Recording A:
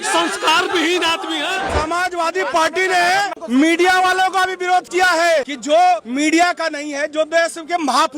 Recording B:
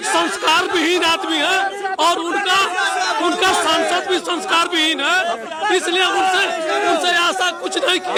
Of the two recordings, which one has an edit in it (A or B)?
A